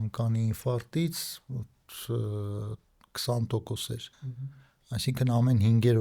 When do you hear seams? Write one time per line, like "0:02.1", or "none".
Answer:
0:04.4